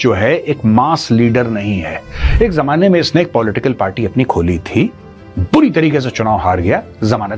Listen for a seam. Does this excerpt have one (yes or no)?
no